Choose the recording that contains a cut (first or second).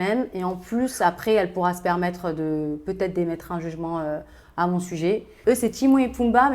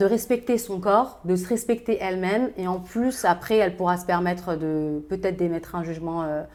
first